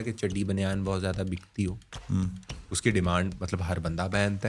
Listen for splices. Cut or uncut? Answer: uncut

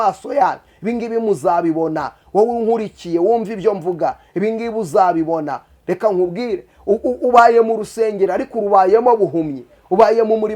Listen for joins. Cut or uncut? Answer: uncut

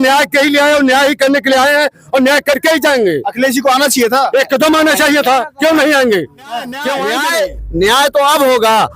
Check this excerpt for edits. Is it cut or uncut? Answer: cut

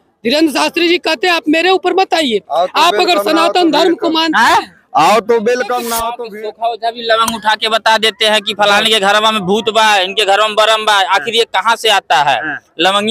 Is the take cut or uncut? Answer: cut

